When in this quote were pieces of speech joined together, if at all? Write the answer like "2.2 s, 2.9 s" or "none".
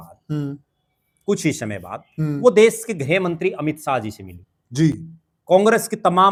none